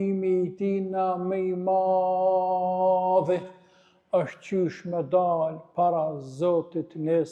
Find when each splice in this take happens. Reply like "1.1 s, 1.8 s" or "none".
none